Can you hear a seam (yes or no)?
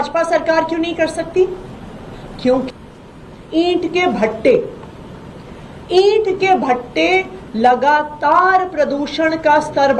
yes